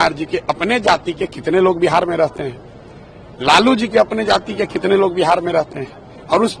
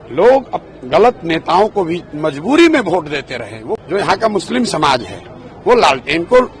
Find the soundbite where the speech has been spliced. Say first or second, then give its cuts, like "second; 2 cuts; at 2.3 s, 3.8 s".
second; 1 cut; at 3.6 s